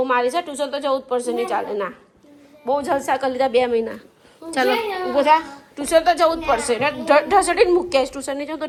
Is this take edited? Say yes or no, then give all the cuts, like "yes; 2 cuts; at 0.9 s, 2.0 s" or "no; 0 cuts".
no; 0 cuts